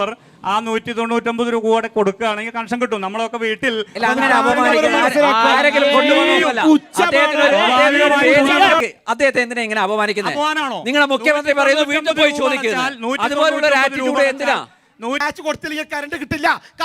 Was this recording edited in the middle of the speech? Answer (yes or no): yes